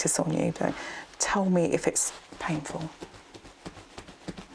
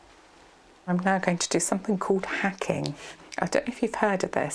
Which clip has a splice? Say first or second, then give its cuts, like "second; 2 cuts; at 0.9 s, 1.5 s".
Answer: second; 2 cuts; at 0.9 s, 3.2 s